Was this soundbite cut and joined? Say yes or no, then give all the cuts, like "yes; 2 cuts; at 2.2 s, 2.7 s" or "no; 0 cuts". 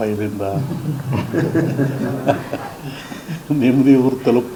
no; 0 cuts